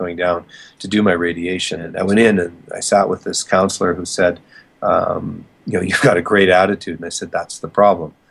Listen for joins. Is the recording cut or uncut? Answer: cut